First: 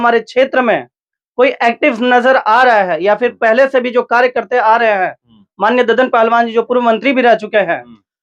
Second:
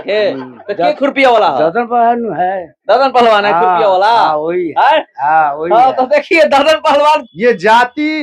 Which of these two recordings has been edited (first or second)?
second